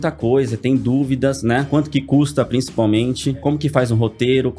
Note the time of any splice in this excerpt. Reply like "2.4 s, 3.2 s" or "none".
1.7 s, 3.4 s